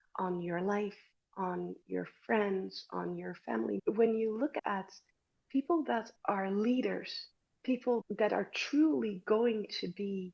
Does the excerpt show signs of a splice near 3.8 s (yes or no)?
yes